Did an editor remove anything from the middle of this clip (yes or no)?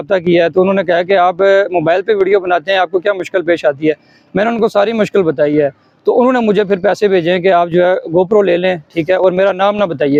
no